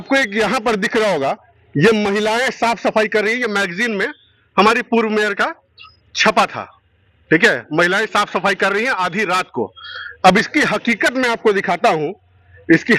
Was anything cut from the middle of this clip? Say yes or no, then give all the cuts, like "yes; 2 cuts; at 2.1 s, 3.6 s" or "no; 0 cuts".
no; 0 cuts